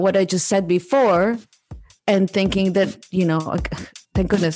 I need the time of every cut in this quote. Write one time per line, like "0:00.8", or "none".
none

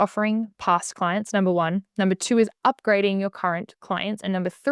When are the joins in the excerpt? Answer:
none

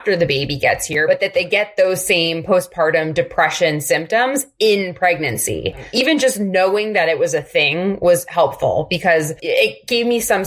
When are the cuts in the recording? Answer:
0:01.0
0:05.9
0:09.4

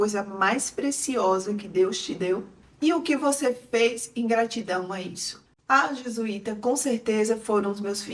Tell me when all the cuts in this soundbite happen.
none

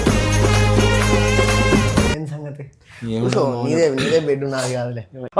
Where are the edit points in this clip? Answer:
0:02.1

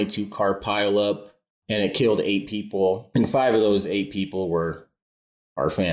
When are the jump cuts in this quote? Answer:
0:03.0

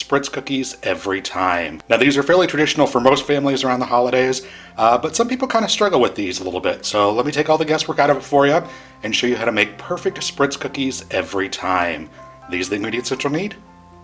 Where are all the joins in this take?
0:01.7

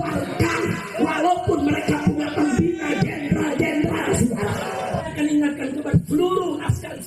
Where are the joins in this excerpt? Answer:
0:05.0

